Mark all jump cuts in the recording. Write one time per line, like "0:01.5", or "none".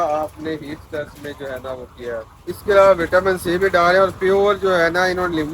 0:02.3

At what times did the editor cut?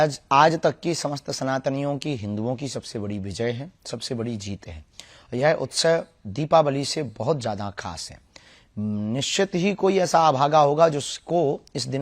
none

